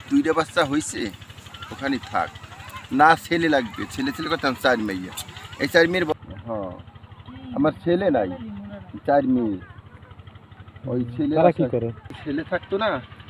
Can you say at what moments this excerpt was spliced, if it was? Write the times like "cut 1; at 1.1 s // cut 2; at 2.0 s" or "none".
cut 1; at 6.1 s // cut 2; at 12.2 s